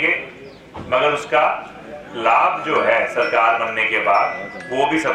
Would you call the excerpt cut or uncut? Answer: uncut